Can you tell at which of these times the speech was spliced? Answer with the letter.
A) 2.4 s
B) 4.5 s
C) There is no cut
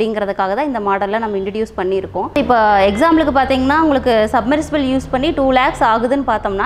A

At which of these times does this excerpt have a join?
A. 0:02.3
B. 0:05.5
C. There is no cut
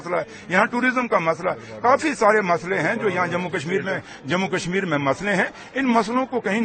C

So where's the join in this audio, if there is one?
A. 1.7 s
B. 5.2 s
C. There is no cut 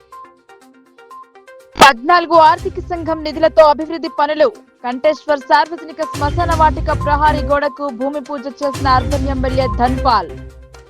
A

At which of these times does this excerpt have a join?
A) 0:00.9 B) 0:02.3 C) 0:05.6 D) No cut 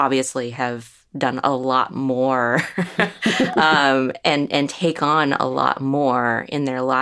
D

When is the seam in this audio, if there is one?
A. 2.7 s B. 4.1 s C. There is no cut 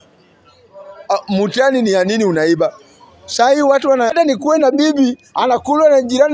B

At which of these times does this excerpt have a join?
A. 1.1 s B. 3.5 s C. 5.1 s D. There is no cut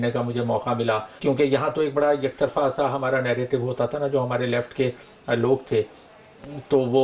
A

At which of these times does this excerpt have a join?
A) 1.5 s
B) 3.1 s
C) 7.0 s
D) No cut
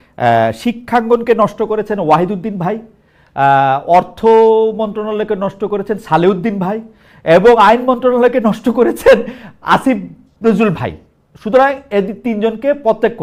D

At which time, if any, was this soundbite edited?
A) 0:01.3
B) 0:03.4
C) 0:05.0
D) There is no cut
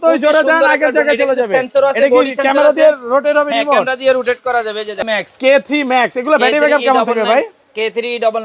C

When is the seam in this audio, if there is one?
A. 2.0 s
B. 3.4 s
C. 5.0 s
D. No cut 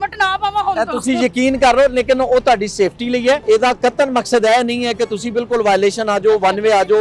B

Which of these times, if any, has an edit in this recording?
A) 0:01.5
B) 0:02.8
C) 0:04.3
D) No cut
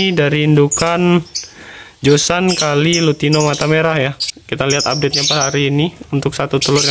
C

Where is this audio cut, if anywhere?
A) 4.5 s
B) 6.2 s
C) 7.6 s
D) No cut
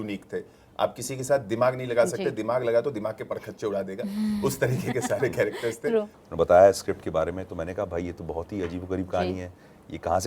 B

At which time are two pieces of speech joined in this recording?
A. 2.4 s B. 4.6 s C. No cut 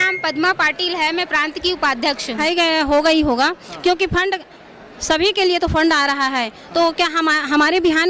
A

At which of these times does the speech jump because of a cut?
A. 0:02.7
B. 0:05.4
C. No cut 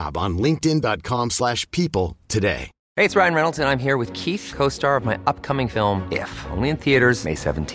A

